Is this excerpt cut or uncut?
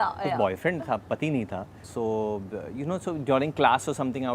uncut